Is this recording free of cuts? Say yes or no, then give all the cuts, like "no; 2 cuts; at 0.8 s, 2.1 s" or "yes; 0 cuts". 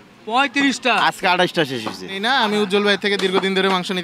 no; 1 cut; at 2.2 s